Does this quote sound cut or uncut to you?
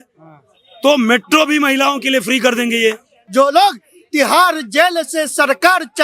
cut